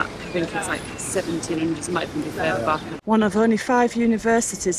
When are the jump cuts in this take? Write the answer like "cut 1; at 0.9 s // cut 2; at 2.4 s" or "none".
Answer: cut 1; at 2.9 s